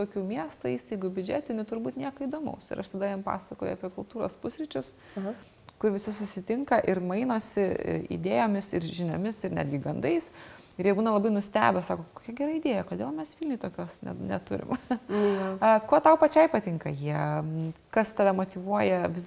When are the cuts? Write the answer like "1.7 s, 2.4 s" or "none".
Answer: none